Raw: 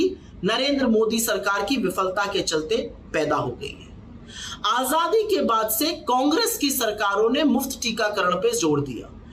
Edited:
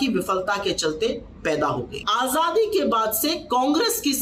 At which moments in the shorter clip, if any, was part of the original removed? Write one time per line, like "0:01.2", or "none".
0:02.0